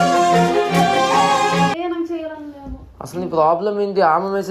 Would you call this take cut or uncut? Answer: cut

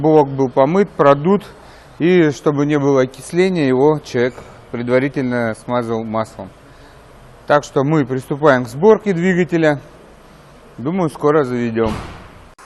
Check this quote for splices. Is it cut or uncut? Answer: uncut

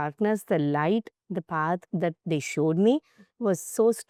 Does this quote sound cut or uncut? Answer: uncut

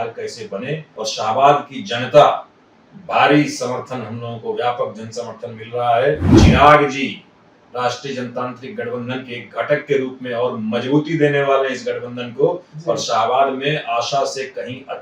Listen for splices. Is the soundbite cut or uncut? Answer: cut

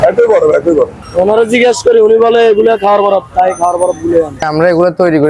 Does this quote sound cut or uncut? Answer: cut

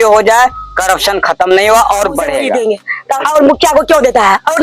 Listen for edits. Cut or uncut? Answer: cut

